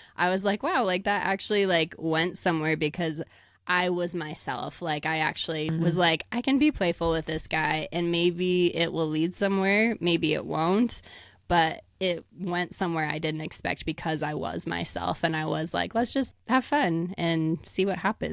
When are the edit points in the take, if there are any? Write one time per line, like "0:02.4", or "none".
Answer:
0:05.7
0:16.3